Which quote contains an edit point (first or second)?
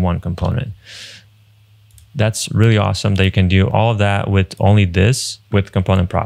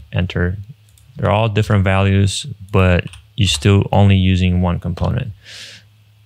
first